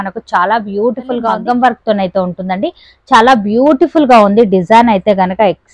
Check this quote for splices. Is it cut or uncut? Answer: cut